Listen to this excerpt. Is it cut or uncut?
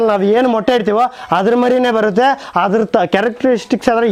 uncut